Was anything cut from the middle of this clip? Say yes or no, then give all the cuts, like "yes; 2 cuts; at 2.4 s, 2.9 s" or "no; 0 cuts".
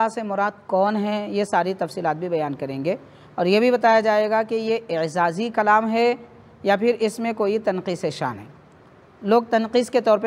no; 0 cuts